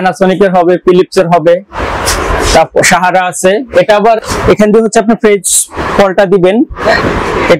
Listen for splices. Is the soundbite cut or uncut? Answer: cut